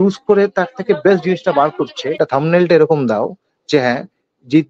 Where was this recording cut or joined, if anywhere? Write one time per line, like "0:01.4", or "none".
0:02.1